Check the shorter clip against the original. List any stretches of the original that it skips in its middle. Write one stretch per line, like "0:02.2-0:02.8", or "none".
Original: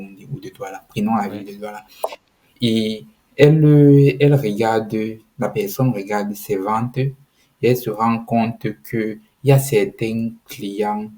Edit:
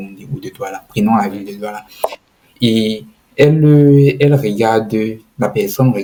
none